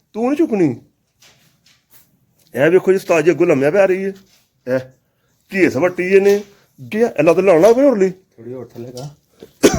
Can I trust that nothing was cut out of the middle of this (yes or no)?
no